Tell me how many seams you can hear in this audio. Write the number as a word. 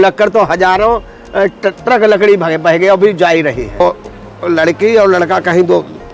one